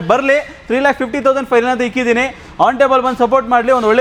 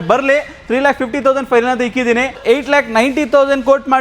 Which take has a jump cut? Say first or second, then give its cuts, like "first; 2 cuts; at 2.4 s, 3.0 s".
second; 1 cut; at 2.4 s